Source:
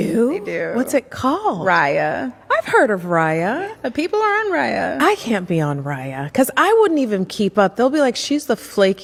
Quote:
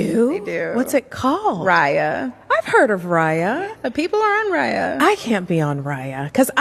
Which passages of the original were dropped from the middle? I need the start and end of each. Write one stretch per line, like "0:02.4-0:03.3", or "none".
none